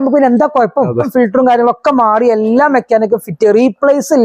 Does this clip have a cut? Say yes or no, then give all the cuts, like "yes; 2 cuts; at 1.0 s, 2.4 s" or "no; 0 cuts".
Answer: yes; 1 cut; at 1.1 s